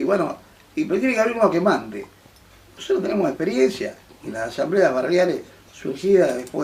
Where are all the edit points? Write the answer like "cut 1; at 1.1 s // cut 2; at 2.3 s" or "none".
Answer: cut 1; at 5.0 s